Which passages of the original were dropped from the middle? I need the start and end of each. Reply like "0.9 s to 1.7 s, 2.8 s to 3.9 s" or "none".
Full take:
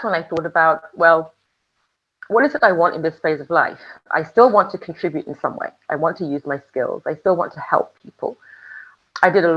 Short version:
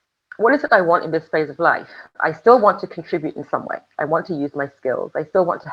none